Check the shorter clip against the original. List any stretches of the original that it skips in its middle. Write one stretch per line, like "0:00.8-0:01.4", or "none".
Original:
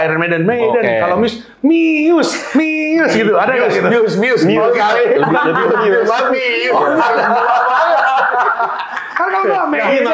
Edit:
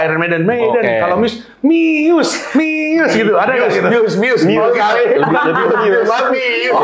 none